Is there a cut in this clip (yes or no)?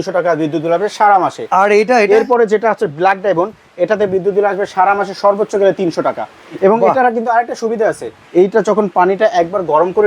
no